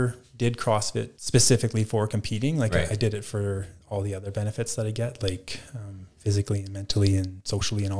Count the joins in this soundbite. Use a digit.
1